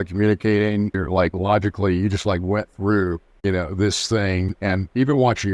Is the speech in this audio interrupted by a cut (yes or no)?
yes